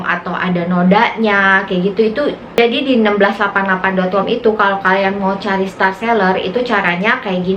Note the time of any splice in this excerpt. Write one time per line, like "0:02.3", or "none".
0:02.4